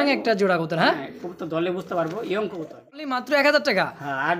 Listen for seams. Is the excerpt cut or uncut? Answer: cut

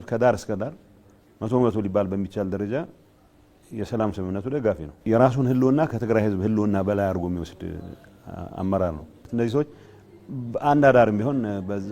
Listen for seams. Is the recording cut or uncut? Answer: cut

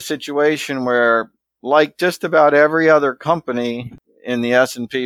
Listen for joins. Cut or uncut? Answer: uncut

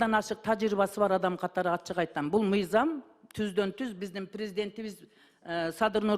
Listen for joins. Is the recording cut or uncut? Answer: uncut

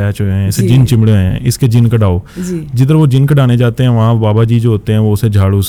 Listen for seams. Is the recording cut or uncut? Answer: uncut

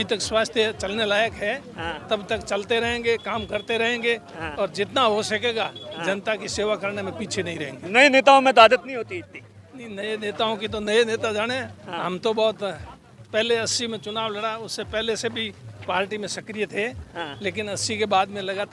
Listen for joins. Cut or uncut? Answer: uncut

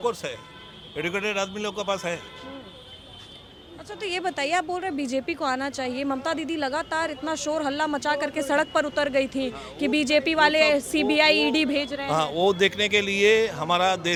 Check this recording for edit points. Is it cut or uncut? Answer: uncut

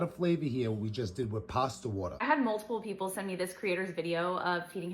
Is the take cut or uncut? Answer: cut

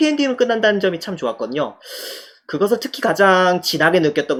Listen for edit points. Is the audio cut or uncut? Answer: uncut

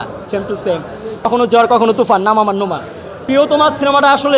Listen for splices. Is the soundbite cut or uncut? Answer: cut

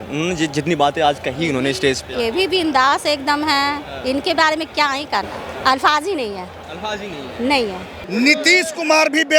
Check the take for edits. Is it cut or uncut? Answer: cut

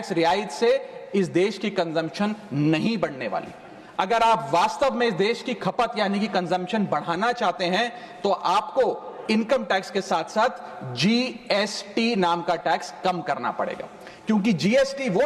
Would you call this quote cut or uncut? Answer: uncut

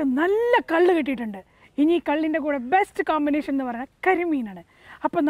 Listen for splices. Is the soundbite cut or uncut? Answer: uncut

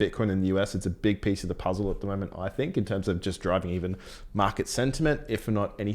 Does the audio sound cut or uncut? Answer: uncut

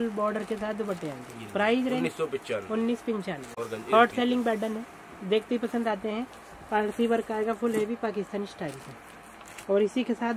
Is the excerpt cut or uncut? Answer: uncut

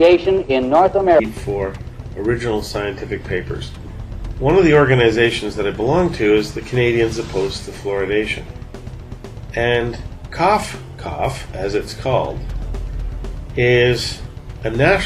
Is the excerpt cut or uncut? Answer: uncut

